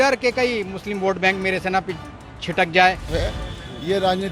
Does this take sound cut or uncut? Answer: cut